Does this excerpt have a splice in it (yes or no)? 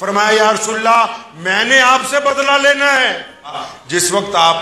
yes